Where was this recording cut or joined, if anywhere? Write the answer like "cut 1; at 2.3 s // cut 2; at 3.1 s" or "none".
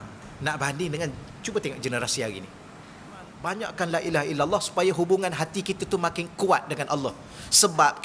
cut 1; at 3.4 s